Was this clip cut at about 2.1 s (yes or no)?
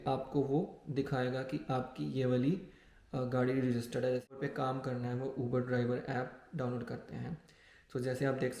no